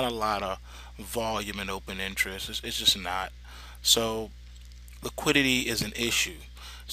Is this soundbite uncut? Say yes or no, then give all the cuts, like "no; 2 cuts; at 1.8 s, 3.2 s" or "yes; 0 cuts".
no; 1 cut; at 2.1 s